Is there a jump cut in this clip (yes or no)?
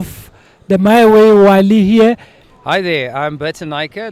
yes